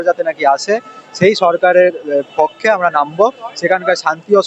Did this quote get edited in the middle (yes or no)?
no